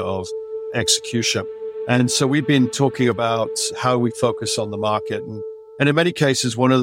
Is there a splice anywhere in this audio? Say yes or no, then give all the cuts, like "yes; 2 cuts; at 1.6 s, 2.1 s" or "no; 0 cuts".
yes; 2 cuts; at 1.7 s, 3.6 s